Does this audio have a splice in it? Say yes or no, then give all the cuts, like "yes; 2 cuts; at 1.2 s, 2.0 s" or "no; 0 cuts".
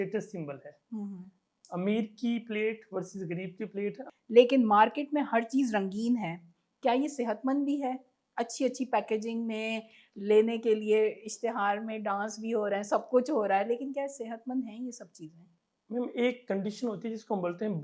yes; 1 cut; at 4.1 s